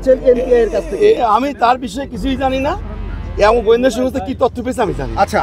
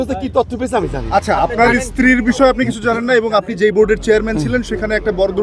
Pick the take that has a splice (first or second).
first